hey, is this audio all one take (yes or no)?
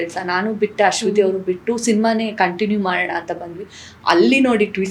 yes